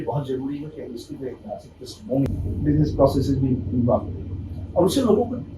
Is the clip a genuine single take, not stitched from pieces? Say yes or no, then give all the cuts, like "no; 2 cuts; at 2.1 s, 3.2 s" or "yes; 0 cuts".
no; 1 cut; at 2.3 s